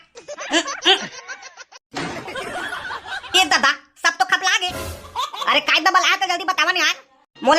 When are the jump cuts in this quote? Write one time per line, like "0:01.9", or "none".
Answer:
0:05.1

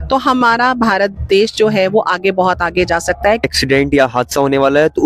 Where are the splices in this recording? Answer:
0:03.5

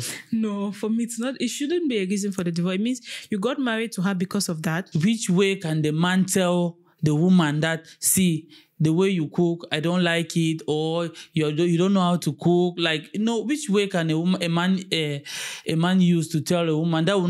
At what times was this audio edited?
0:04.9

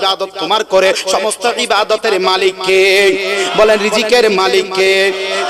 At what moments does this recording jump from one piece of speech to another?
none

